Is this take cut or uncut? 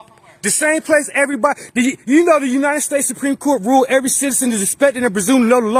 uncut